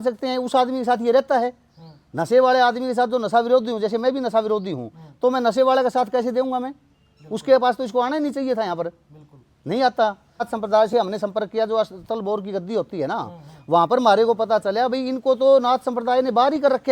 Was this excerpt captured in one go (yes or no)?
no